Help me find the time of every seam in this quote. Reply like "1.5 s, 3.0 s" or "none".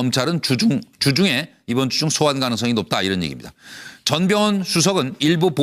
2.0 s